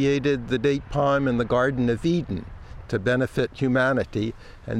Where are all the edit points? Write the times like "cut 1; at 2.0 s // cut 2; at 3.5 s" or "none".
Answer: cut 1; at 2.7 s